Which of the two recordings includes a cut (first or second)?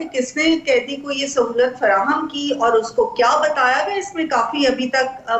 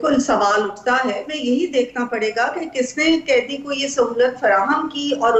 second